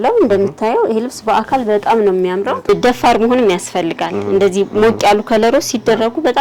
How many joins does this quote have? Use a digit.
1